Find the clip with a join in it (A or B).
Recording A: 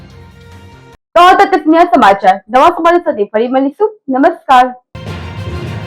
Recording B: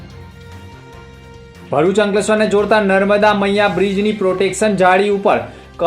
B